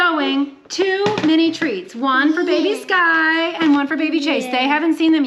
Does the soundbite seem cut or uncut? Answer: uncut